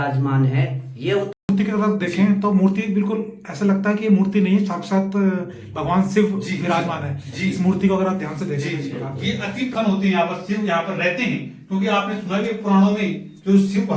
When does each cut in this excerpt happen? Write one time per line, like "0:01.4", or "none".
0:01.3
0:09.7